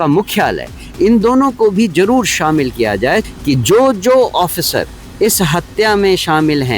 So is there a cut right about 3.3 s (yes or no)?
yes